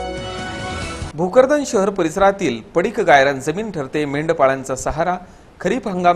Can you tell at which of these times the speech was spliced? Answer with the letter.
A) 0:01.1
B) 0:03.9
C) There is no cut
A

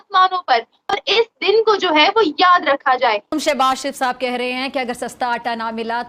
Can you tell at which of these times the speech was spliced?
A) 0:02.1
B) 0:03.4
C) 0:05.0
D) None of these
B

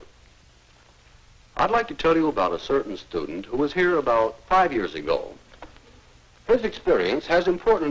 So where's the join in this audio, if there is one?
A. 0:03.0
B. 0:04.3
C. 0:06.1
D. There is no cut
B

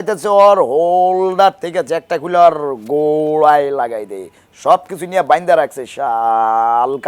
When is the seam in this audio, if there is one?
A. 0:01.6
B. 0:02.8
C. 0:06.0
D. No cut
D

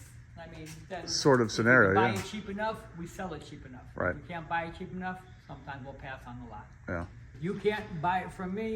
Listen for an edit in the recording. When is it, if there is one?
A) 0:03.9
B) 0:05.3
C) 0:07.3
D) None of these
C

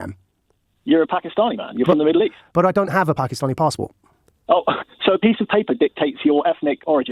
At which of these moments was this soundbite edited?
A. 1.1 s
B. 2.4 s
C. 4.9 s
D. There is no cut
D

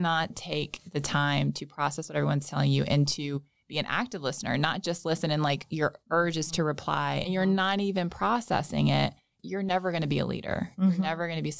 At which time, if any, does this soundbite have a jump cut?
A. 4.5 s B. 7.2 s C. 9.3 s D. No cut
B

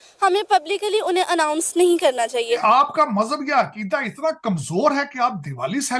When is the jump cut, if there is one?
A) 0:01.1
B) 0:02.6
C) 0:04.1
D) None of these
B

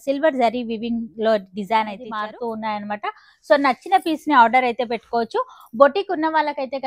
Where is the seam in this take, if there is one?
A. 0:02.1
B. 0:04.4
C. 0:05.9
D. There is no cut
A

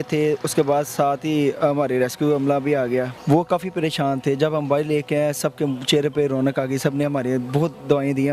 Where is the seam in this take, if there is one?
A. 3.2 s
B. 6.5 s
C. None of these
A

